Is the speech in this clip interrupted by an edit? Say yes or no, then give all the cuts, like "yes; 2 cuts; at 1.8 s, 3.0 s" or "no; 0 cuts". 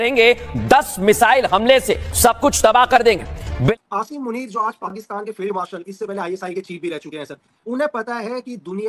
yes; 1 cut; at 3.7 s